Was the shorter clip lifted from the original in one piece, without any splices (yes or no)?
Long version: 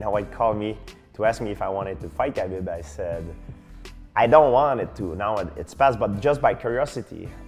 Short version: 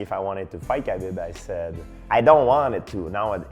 no